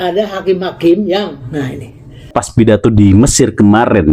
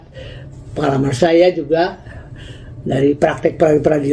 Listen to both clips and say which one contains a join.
first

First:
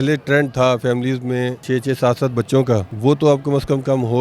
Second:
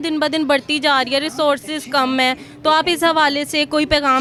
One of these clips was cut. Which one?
first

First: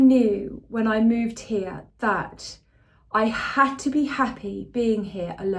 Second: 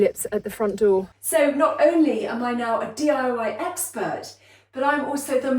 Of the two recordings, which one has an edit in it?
second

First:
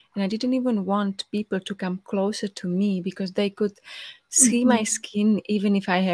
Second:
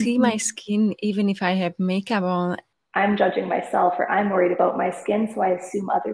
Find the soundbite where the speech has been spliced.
second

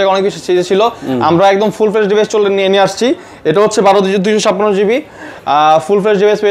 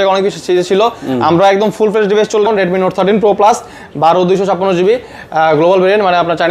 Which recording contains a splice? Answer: second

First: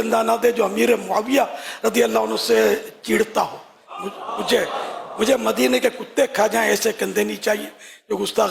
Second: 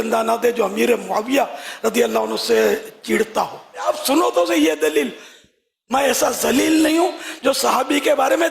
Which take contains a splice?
second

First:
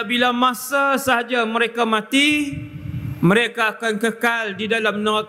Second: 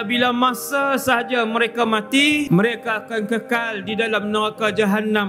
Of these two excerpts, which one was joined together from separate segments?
second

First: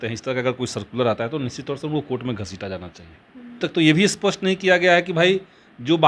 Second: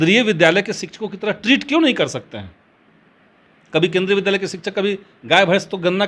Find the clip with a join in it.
first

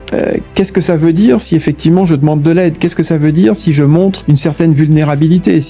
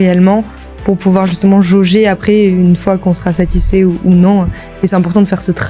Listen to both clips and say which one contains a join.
first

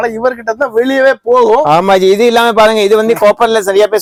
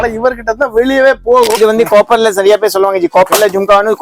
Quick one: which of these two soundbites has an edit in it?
second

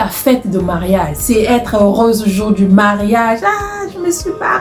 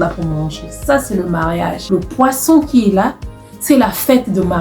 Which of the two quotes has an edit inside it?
second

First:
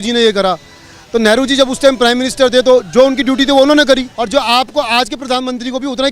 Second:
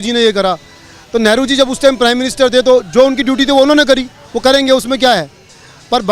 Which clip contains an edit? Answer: first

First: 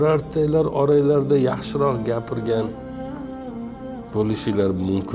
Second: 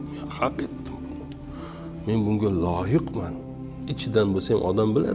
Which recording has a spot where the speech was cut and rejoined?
first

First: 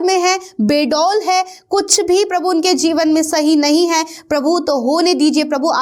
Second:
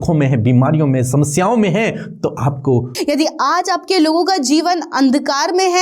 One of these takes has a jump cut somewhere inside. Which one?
second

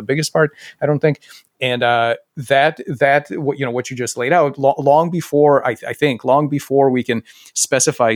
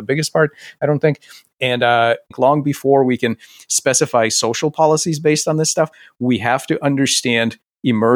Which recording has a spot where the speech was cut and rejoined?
second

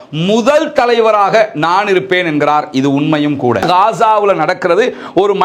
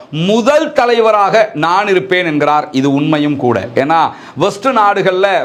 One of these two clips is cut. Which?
first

